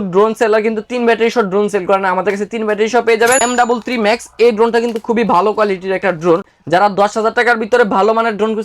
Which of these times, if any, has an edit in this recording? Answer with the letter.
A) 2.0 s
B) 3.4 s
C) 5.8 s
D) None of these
B